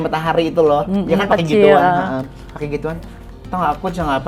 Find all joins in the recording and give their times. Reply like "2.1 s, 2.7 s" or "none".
none